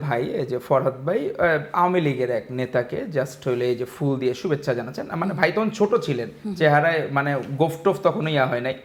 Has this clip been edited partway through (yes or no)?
no